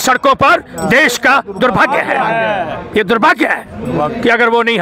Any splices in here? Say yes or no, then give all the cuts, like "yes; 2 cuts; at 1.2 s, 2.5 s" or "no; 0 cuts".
no; 0 cuts